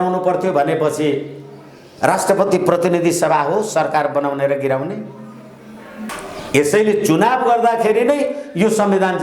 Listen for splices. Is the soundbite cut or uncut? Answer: cut